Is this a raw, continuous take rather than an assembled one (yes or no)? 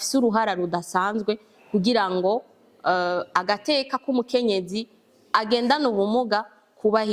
yes